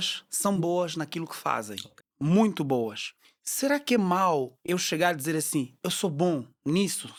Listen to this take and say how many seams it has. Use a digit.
0